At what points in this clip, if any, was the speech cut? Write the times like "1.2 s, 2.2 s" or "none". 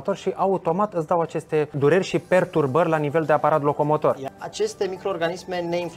1.7 s, 4.2 s